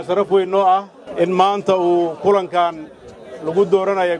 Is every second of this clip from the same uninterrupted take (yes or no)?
no